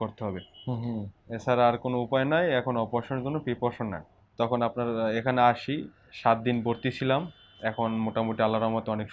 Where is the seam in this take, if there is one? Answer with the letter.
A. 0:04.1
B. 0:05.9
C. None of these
A